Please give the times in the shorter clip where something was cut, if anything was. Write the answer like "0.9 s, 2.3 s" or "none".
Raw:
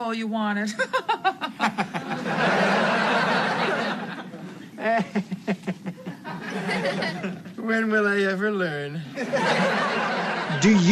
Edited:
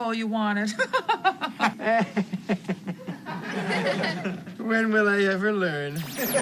1.7 s

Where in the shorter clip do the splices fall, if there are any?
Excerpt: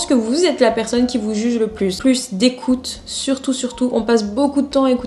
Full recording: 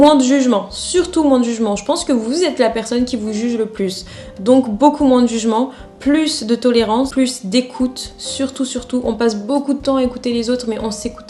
2.0 s

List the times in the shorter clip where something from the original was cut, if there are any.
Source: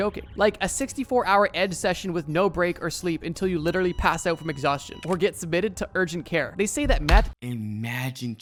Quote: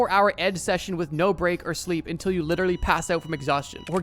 none

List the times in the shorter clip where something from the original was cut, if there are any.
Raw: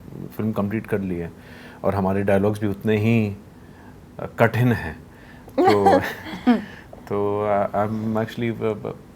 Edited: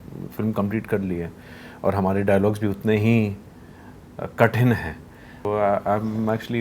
5.5 s

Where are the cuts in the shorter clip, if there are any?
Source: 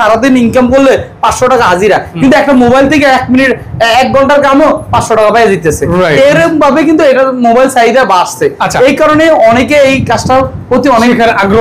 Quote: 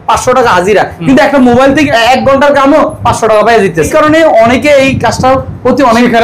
1.9 s, 3.9 s

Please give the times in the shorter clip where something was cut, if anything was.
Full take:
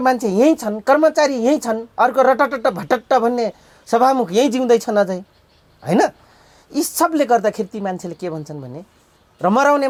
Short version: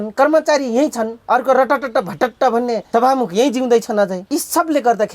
2.8 s, 4.2 s

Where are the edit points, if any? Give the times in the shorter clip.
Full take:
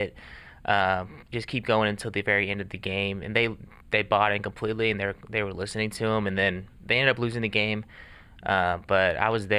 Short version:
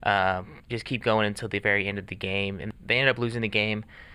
2.6 s

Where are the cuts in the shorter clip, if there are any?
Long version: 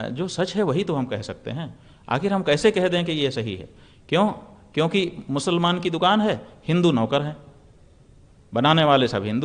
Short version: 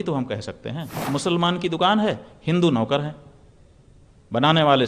1.0 s

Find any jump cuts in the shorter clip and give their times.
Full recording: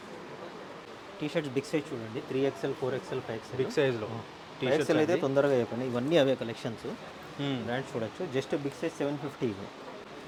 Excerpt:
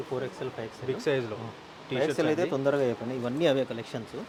none

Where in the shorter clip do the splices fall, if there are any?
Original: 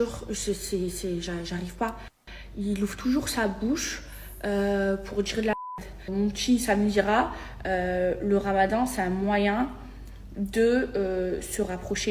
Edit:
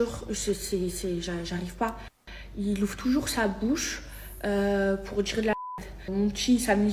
none

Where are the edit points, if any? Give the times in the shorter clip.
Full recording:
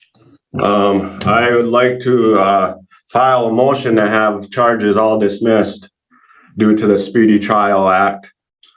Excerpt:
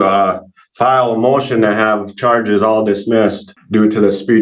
3.5 s

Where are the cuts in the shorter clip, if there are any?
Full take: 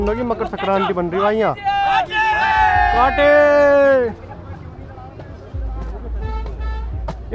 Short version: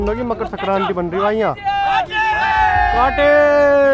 none

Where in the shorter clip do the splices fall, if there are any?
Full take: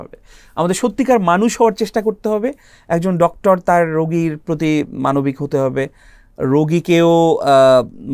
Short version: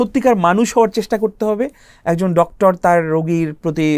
none

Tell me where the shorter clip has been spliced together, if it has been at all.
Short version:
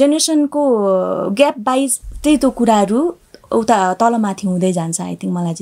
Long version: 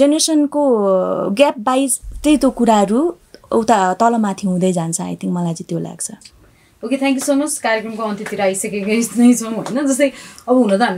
none

